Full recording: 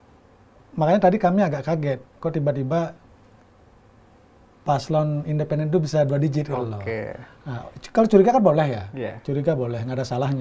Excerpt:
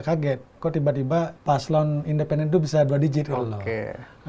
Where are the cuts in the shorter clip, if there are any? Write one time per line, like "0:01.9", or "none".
0:01.4